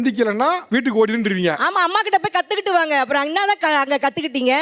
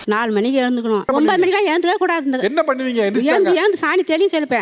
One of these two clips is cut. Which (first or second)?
second